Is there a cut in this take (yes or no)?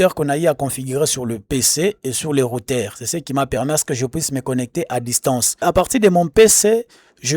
yes